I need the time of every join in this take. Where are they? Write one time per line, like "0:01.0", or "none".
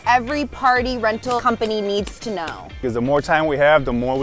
0:01.4
0:02.6